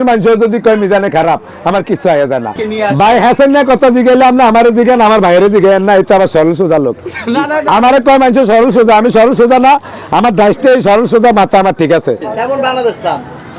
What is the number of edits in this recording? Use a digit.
2